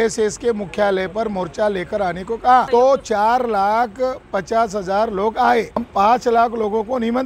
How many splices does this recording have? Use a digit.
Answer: 2